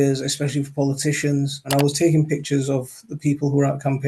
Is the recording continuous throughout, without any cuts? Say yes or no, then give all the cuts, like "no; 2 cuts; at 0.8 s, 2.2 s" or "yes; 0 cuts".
no; 1 cut; at 1.6 s